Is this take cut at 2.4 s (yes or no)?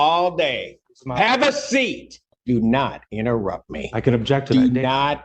yes